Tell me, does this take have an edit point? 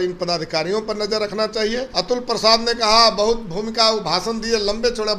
yes; 1 cut; at 1.9 s

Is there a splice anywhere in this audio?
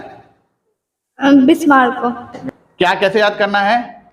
yes; 1 cut; at 2.3 s

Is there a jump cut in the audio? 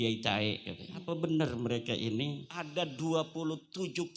yes; 2 cuts; at 1.0 s, 2.6 s

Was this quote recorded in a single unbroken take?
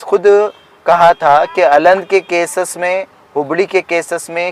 yes; 0 cuts

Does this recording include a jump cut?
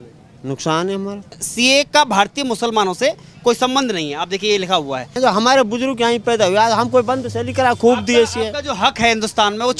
yes; 2 cuts; at 1.4 s, 5.1 s

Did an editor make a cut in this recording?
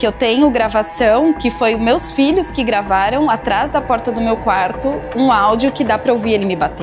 no; 0 cuts

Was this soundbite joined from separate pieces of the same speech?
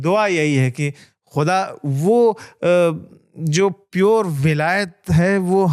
no; 0 cuts

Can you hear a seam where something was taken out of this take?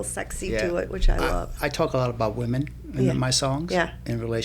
yes; 1 cut; at 1.6 s

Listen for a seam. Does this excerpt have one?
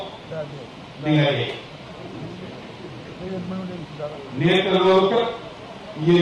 no; 0 cuts

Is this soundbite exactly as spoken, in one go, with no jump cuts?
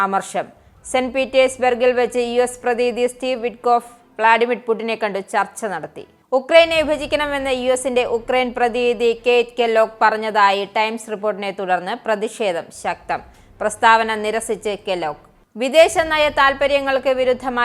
yes; 0 cuts

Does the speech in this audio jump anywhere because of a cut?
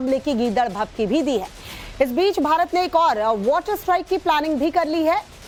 no; 0 cuts

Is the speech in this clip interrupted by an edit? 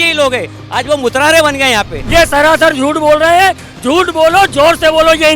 yes; 1 cut; at 2.0 s

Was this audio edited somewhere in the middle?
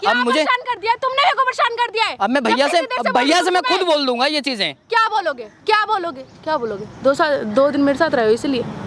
no; 0 cuts

